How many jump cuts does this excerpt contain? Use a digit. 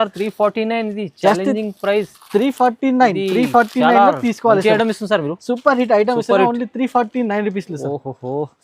0